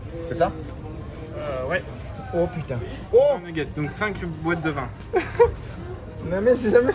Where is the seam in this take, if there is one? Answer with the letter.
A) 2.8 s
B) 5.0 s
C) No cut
B